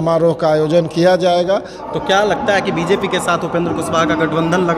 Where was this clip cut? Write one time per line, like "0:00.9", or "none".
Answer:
0:01.8